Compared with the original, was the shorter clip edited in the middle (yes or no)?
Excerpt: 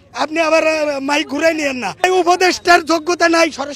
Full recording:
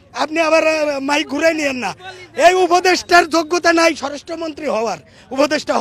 yes